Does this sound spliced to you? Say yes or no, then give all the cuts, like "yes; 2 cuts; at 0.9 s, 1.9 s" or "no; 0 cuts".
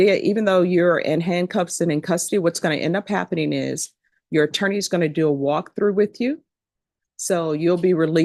no; 0 cuts